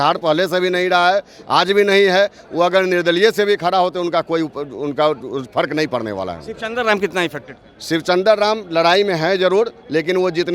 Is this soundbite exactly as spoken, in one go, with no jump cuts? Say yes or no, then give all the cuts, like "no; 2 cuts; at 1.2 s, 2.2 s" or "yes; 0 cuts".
yes; 0 cuts